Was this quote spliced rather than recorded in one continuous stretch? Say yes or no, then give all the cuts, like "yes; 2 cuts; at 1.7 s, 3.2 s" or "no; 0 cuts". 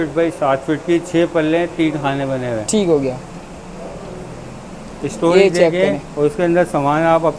no; 0 cuts